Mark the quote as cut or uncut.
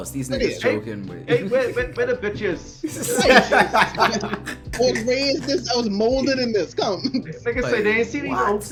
uncut